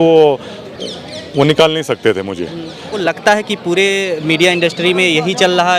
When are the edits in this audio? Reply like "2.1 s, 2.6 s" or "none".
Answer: 2.9 s